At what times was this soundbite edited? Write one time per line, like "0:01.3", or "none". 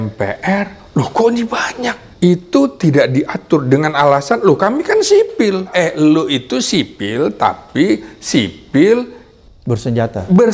0:02.0
0:05.7